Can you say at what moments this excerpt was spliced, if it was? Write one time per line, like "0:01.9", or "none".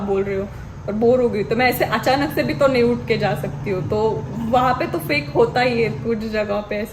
none

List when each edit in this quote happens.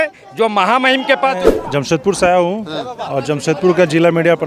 0:01.4

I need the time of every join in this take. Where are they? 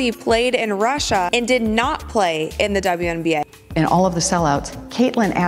0:03.5

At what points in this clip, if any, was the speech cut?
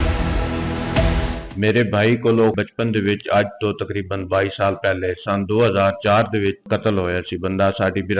0:01.4
0:02.6
0:06.6

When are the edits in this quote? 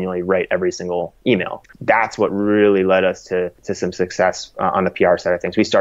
0:01.6
0:03.6

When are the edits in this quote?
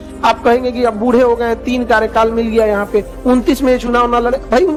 none

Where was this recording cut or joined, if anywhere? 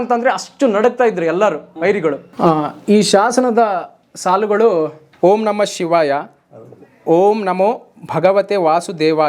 0:02.3
0:05.0

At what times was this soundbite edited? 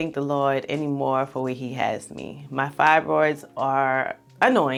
none

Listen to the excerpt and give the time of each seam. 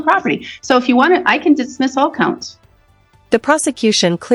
none

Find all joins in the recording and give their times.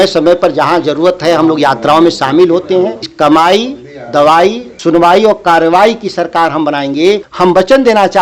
0:03.0
0:04.7
0:07.3

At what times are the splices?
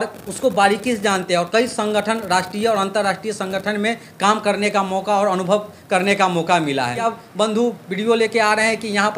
0:07.0

